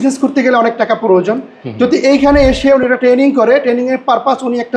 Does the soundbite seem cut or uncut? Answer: uncut